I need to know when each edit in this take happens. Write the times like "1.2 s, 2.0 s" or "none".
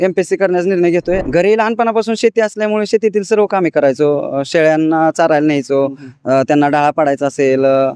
1.2 s